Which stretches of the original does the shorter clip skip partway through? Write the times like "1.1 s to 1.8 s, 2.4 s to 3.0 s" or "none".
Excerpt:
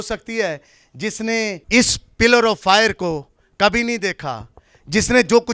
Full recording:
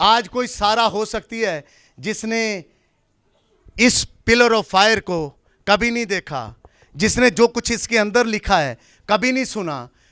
2.6 s to 3.7 s